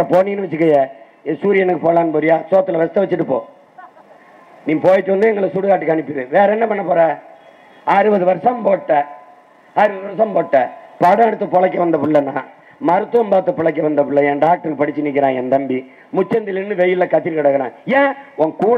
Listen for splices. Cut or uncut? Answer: uncut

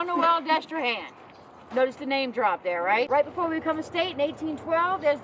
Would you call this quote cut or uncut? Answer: cut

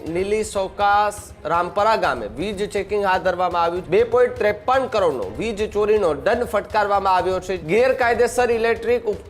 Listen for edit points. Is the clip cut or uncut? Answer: cut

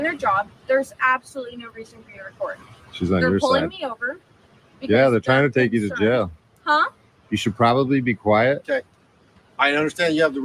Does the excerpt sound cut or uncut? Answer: cut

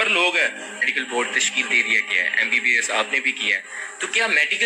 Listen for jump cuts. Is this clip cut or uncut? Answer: cut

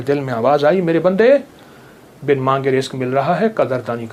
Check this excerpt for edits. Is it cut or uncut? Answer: uncut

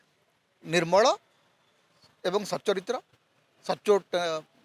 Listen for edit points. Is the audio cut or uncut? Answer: uncut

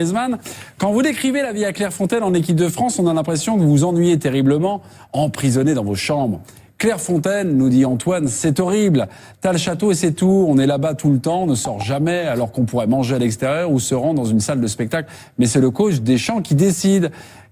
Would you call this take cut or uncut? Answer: cut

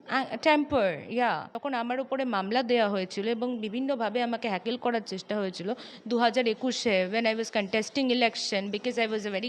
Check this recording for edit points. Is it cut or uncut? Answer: cut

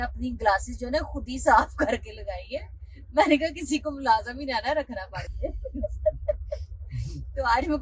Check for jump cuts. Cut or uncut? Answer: uncut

